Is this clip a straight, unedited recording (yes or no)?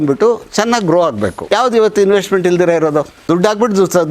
no